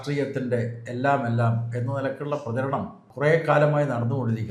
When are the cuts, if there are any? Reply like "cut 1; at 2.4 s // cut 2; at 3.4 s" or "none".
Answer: cut 1; at 3.1 s